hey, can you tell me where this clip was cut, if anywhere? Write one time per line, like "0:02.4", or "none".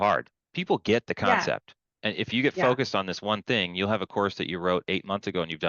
none